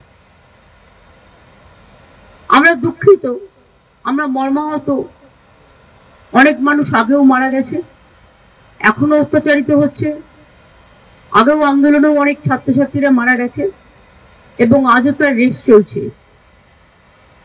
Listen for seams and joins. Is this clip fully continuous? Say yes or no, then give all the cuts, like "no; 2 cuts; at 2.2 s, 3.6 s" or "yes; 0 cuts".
yes; 0 cuts